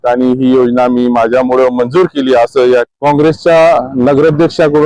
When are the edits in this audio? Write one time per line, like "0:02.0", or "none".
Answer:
0:02.9